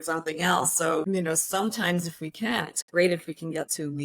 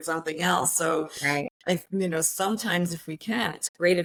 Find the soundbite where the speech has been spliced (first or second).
first